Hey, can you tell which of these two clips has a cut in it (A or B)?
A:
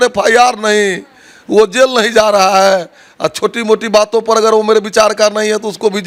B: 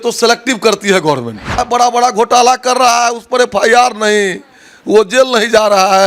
B